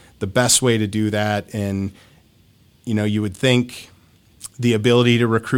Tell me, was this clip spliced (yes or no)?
no